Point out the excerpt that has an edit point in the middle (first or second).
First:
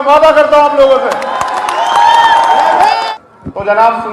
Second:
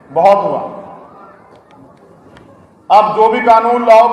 first